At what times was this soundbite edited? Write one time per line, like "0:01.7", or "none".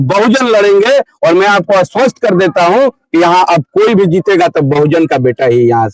none